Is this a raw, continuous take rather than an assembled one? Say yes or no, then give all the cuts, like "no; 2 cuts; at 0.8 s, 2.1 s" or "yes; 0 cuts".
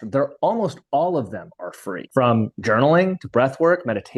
yes; 0 cuts